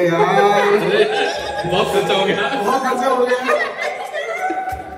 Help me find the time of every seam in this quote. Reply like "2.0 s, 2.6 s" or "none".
3.8 s